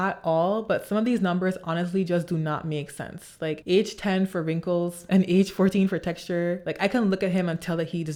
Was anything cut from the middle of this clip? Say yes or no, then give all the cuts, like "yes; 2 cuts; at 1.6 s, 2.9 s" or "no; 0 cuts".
no; 0 cuts